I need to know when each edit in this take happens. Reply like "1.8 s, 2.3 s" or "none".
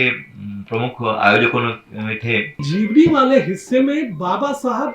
2.7 s